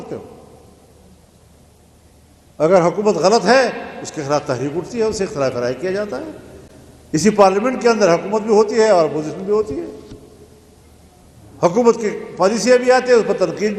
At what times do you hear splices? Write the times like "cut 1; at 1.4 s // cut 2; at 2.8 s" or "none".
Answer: none